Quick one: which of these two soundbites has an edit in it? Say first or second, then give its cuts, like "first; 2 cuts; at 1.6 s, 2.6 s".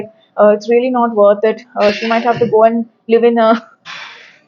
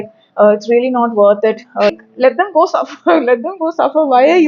second; 1 cut; at 2.0 s